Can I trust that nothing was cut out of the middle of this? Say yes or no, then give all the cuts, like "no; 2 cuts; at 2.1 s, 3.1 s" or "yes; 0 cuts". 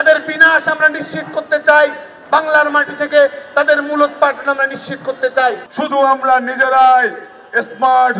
no; 1 cut; at 5.7 s